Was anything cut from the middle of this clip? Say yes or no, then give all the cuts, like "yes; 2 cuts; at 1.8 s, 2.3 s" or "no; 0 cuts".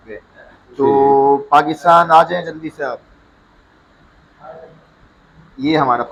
no; 0 cuts